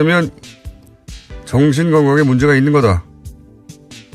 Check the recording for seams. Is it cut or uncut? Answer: cut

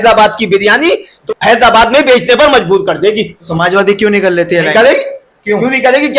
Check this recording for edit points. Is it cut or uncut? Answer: cut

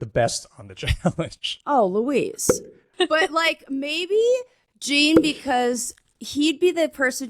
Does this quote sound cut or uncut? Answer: cut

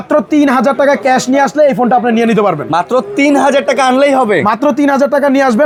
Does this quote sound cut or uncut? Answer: uncut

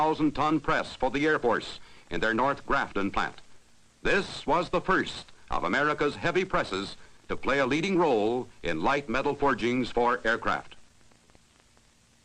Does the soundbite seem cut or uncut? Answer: cut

